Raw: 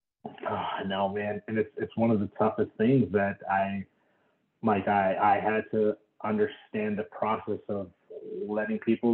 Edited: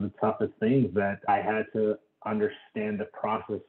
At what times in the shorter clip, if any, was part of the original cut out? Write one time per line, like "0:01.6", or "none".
0:01.3